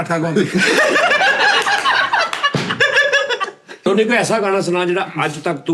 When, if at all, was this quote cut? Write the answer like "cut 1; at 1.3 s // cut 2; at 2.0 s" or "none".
cut 1; at 3.9 s